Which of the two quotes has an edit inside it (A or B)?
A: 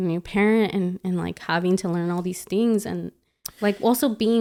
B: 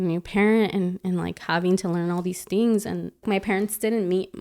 B